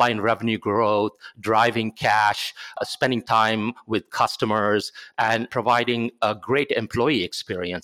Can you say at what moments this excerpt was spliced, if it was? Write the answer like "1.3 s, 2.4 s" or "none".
2.8 s, 5.5 s